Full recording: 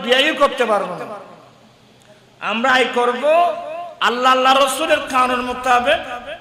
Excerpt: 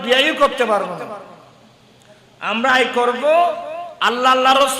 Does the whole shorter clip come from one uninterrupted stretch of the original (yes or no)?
yes